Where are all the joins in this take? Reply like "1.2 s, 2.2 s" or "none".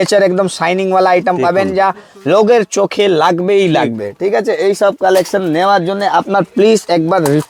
none